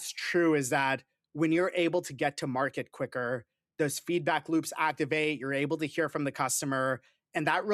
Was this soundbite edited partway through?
no; 0 cuts

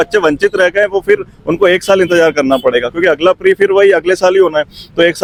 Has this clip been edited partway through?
no; 0 cuts

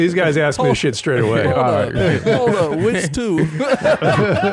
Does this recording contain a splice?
no; 0 cuts

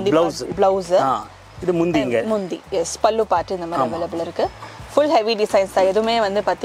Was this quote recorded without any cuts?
yes; 0 cuts

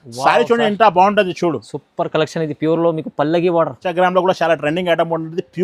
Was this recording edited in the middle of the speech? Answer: yes; 1 cut; at 3.8 s

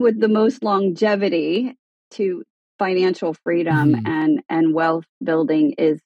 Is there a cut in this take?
no; 0 cuts

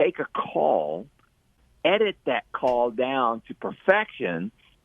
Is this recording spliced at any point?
yes; 1 cut; at 1.6 s

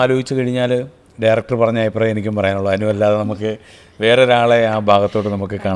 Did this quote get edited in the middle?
no; 0 cuts

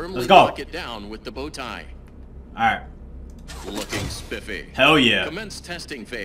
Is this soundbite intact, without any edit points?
yes; 0 cuts

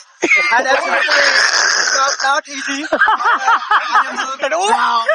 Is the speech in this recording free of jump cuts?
yes; 0 cuts

